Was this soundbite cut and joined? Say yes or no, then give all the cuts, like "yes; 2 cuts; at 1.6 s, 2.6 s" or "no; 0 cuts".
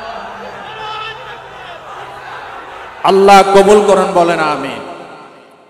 yes; 1 cut; at 3.0 s